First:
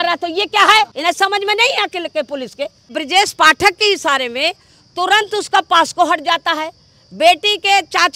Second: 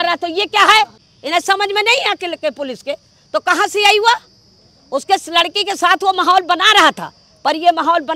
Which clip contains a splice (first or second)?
first